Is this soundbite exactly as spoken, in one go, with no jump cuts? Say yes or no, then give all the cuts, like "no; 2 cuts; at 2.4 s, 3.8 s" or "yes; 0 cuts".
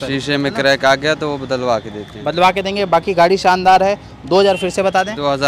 yes; 0 cuts